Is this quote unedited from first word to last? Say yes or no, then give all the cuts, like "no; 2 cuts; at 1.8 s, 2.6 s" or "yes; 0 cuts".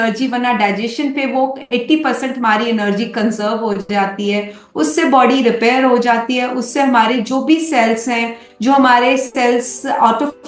yes; 0 cuts